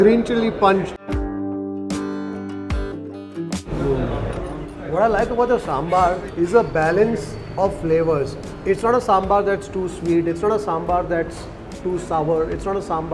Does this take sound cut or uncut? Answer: cut